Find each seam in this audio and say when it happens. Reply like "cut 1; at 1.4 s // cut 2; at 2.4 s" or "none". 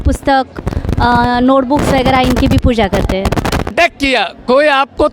cut 1; at 3.7 s